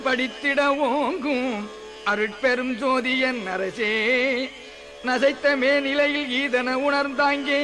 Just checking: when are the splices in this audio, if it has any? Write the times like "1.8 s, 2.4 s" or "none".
none